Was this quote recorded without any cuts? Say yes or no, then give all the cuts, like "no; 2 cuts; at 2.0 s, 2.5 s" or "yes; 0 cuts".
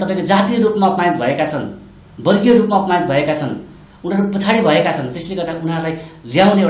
yes; 0 cuts